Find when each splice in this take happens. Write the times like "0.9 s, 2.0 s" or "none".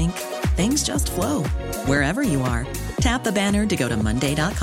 none